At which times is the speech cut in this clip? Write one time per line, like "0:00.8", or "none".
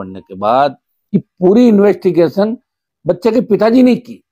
0:00.9